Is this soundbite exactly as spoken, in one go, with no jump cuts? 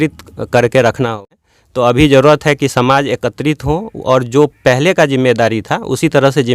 no; 1 cut; at 1.2 s

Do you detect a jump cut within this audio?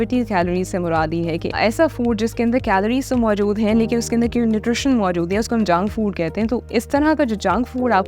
yes; 1 cut; at 1.6 s

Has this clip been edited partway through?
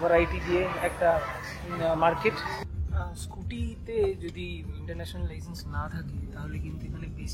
yes; 1 cut; at 2.5 s

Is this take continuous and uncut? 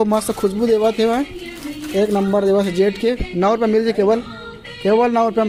yes; 0 cuts

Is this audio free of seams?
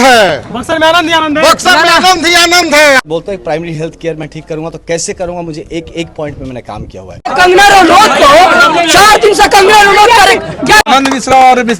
no; 3 cuts; at 3.0 s, 7.3 s, 10.9 s

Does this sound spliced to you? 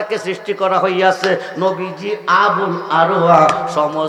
no; 0 cuts

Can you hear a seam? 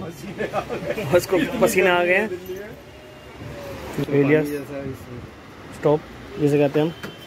yes; 1 cut; at 4.1 s

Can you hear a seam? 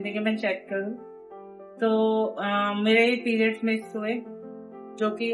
no; 0 cuts

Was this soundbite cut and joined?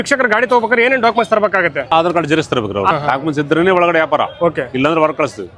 yes; 2 cuts; at 1.8 s, 2.9 s

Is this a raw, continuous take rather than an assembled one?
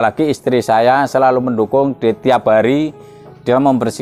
yes; 0 cuts

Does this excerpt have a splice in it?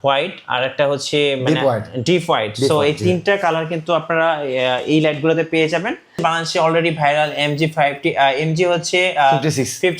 yes; 1 cut; at 6.2 s

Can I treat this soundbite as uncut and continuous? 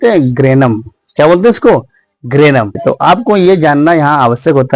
no; 1 cut; at 2.8 s

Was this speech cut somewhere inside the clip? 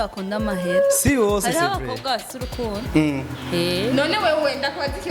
no; 0 cuts

